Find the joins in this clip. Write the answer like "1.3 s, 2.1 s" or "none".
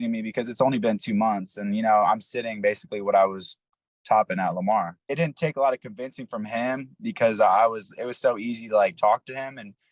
5.1 s